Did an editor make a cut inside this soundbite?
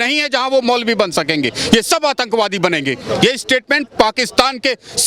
no; 0 cuts

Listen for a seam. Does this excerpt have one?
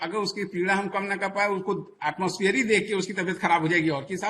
no; 0 cuts

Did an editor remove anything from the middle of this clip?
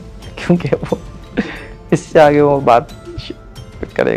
no; 0 cuts

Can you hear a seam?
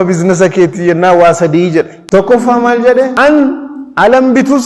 yes; 2 cuts; at 2.0 s, 3.1 s

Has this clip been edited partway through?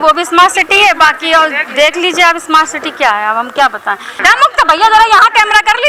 yes; 1 cut; at 4.2 s

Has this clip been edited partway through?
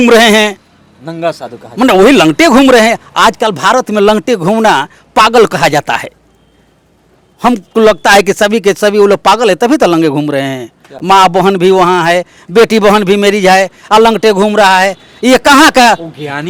no; 0 cuts

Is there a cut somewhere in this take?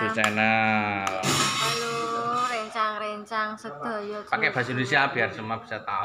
yes; 1 cut; at 1.2 s

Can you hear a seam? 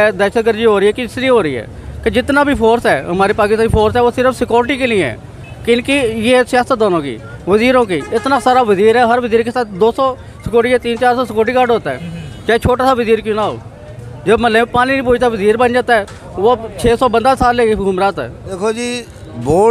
yes; 1 cut; at 18.3 s

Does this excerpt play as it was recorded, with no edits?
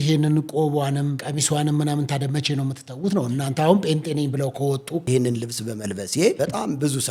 no; 3 cuts; at 1.2 s, 5.1 s, 6.4 s

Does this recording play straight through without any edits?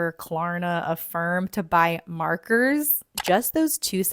no; 1 cut; at 3.1 s

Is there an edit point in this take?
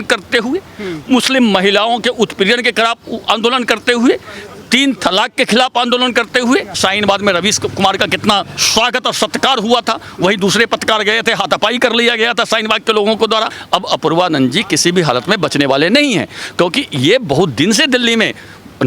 yes; 2 cuts; at 6.8 s, 13.6 s

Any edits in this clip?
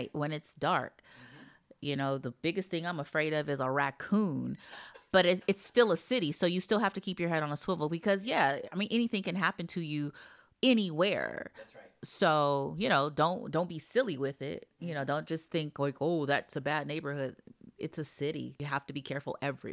yes; 1 cut; at 18.6 s

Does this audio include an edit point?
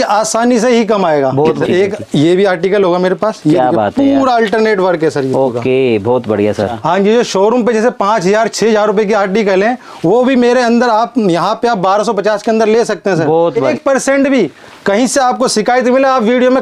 yes; 3 cuts; at 1.6 s, 6.7 s, 13.7 s

